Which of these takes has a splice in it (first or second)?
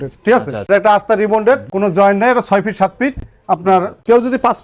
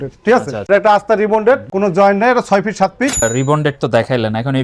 second